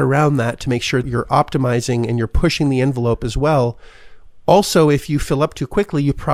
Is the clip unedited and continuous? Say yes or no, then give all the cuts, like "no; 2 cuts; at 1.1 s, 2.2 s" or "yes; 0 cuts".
yes; 0 cuts